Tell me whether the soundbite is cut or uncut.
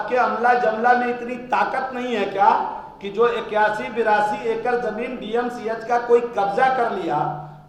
uncut